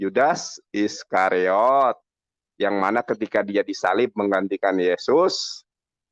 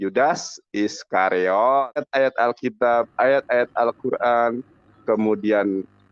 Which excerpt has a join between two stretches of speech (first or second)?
second